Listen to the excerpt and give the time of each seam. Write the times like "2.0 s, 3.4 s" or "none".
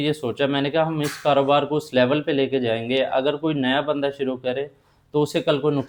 none